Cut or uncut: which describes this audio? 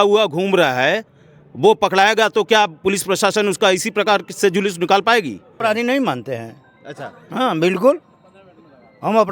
cut